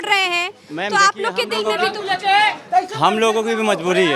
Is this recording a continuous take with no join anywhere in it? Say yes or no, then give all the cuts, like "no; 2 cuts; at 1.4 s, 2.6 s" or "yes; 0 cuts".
yes; 0 cuts